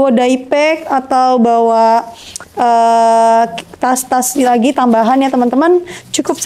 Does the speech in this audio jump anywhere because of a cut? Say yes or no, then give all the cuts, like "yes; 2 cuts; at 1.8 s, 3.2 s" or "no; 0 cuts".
no; 0 cuts